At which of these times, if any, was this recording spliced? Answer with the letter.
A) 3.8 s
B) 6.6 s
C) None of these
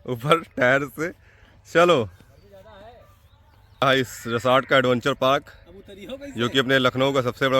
A